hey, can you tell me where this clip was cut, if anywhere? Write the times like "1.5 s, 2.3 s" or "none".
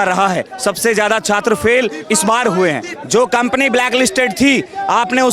2.9 s